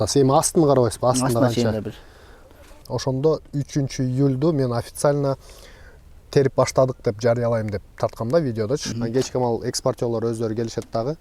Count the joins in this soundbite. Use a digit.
2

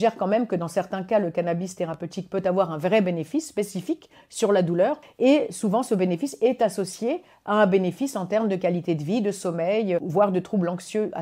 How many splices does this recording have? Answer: 2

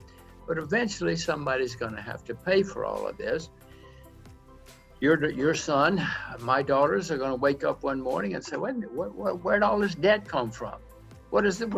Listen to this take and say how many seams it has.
0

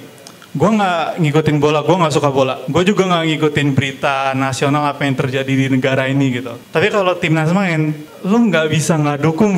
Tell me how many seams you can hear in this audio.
3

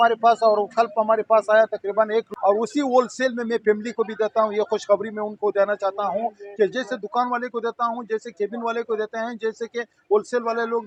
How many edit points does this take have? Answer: 0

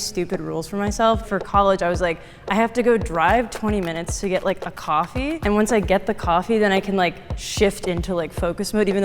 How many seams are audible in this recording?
1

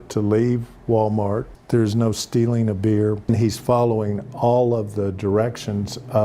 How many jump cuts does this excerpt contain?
2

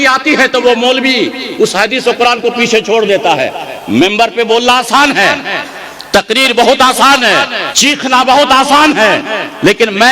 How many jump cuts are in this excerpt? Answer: 1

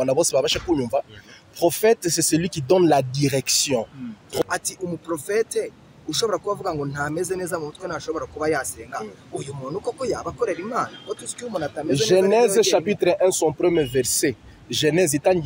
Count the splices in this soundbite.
1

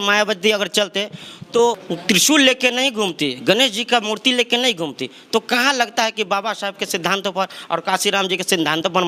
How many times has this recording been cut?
0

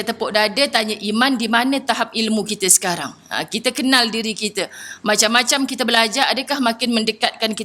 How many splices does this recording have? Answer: 0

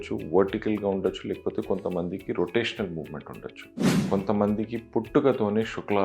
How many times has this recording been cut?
1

